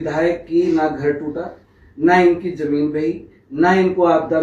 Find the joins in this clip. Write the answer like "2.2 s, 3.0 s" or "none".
none

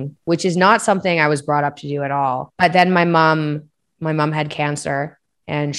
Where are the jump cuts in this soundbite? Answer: 2.5 s

